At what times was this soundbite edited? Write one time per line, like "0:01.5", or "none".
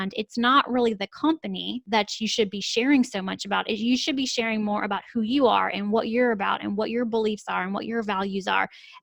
0:01.8